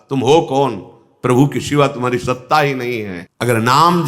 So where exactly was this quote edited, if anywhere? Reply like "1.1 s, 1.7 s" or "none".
3.2 s